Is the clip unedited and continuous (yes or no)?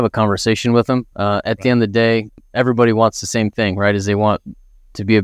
yes